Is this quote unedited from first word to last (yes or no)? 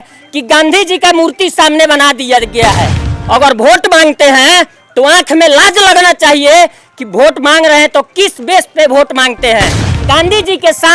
no